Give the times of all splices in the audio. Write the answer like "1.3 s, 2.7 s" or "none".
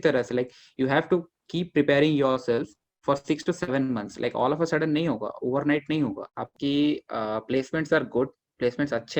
6.4 s